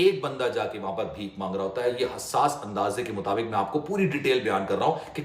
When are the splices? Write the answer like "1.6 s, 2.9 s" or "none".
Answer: none